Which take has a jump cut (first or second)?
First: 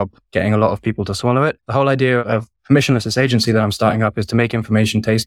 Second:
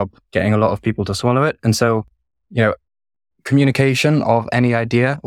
first